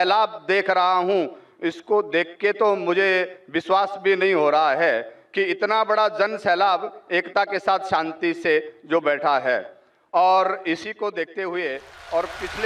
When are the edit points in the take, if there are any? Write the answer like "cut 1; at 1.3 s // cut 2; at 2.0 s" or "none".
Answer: none